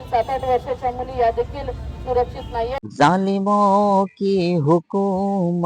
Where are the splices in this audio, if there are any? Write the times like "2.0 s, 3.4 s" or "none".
2.8 s